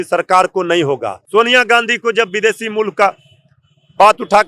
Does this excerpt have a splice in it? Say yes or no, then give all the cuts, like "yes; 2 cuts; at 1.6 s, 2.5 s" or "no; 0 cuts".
yes; 1 cut; at 1.1 s